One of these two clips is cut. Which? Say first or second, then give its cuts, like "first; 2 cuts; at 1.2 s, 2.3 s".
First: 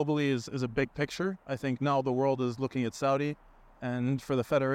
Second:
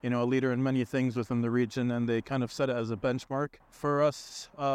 second; 1 cut; at 3.6 s